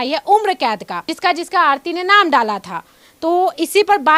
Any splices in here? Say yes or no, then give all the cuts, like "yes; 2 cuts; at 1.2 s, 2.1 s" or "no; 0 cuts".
no; 0 cuts